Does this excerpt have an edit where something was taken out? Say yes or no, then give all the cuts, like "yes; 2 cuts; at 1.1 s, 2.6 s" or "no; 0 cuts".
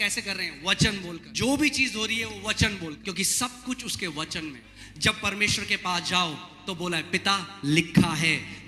yes; 3 cuts; at 1.2 s, 3.0 s, 4.7 s